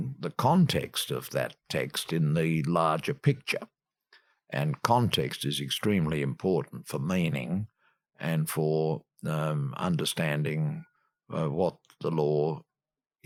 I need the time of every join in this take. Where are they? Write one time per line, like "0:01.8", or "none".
none